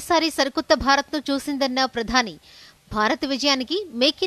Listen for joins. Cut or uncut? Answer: uncut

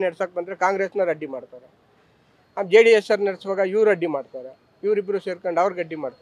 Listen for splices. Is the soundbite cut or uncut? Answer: uncut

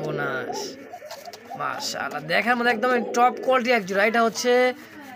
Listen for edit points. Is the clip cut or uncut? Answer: uncut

